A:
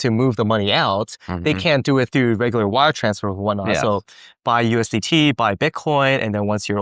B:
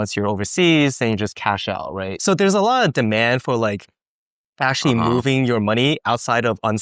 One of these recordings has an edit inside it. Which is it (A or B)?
B